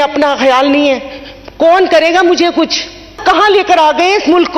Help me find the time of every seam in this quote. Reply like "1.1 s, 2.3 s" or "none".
3.2 s